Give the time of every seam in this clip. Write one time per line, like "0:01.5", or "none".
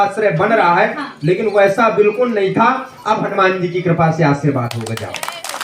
none

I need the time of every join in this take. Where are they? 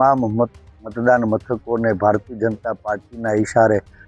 none

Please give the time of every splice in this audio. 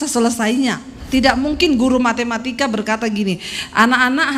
0:01.0

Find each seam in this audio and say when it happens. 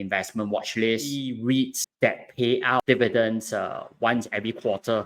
0:01.2

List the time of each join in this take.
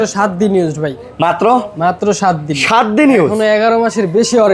none

